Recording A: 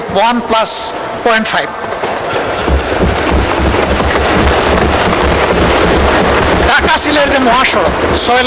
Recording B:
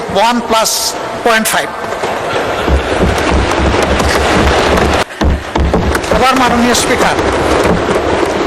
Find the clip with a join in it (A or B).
B